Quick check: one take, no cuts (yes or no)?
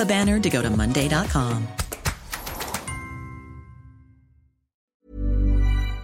no